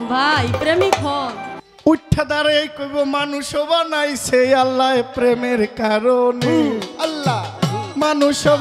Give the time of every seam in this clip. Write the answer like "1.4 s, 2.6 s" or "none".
1.5 s